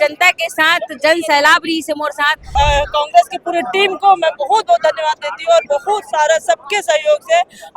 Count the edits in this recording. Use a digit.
1